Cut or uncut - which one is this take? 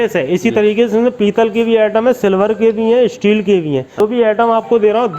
cut